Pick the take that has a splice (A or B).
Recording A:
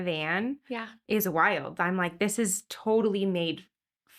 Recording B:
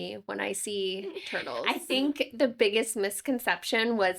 B